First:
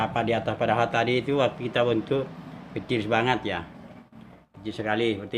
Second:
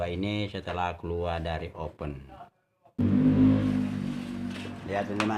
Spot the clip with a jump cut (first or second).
second